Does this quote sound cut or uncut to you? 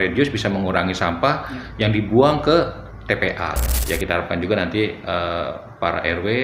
cut